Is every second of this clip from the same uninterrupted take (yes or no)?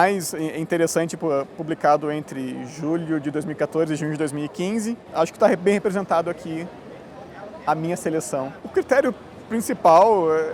no